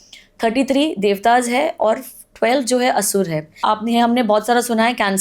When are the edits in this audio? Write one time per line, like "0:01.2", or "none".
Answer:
0:03.6